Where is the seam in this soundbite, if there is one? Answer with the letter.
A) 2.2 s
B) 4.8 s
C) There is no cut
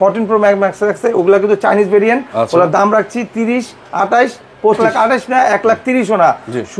B